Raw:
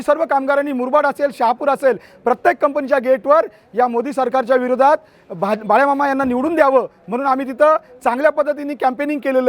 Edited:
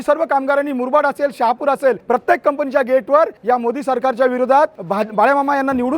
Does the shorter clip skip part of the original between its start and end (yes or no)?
yes